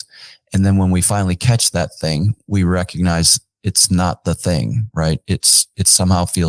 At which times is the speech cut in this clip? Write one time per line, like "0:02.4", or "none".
none